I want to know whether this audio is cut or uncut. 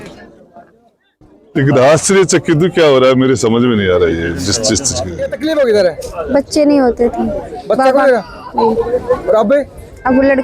cut